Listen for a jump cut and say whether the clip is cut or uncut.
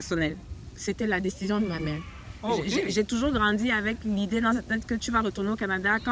uncut